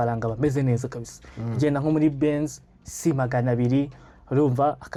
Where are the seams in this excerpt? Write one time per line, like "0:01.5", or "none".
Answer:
none